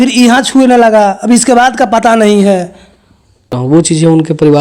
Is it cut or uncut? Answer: cut